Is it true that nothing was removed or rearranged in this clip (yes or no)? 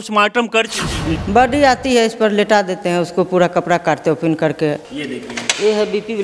no